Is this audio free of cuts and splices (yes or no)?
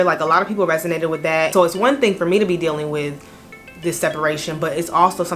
no